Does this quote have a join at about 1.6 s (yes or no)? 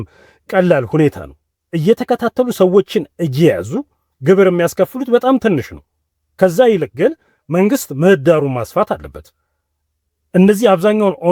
no